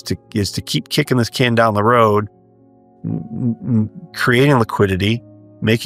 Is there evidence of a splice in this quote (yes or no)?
no